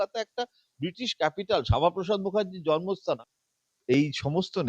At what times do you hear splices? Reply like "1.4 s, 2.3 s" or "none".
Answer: 3.2 s